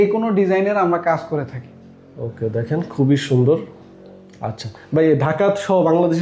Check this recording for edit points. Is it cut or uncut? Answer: uncut